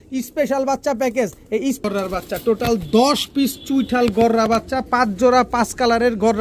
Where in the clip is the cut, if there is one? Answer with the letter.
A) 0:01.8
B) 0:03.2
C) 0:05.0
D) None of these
A